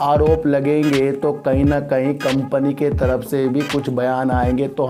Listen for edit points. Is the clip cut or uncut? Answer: uncut